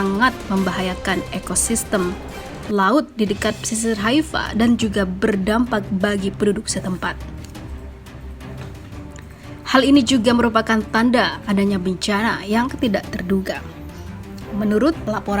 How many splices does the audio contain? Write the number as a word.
two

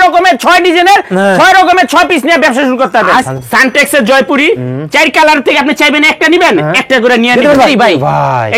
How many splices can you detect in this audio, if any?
two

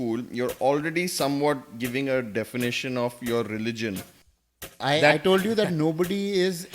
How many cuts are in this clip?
one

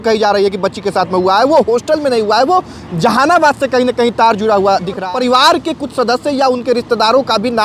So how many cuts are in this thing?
one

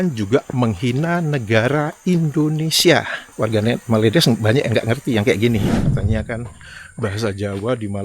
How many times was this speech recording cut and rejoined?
two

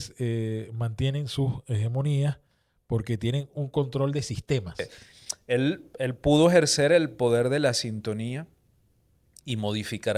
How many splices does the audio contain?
one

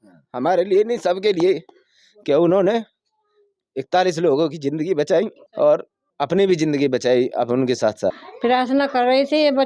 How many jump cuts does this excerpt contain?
three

